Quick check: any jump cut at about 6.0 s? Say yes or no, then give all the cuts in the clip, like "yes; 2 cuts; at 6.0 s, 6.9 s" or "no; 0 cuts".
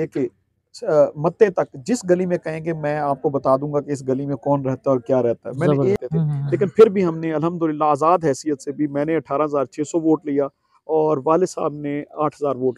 yes; 1 cut; at 6.0 s